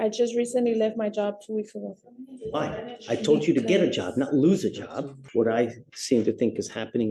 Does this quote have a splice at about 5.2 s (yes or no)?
yes